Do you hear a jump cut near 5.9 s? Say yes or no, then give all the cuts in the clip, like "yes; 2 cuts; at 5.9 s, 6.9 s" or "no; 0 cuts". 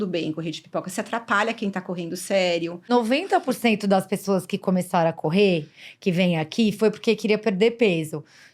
no; 1 cut; at 2.9 s